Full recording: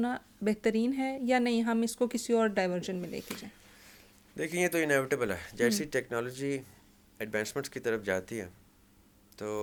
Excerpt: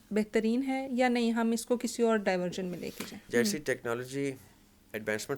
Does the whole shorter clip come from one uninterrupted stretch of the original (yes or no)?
no